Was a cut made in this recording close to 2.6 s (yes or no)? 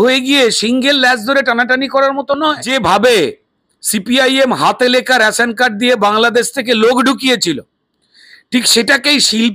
yes